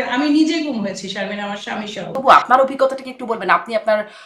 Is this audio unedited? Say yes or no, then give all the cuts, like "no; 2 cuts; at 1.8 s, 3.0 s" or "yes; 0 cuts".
no; 1 cut; at 2.1 s